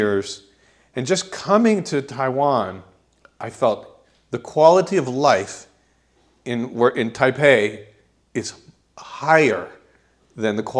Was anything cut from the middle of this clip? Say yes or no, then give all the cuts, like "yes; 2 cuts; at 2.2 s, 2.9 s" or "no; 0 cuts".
no; 0 cuts